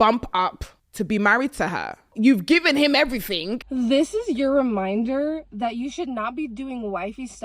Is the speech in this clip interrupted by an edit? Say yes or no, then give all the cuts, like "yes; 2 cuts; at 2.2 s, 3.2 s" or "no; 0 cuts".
yes; 1 cut; at 3.6 s